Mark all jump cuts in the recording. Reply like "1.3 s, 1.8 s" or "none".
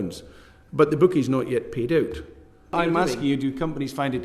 2.7 s